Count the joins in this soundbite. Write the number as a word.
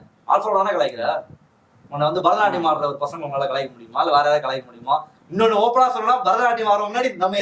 zero